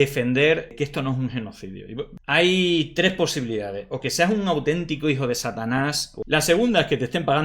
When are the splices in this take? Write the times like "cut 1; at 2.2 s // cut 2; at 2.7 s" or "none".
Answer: cut 1; at 2.1 s // cut 2; at 6.1 s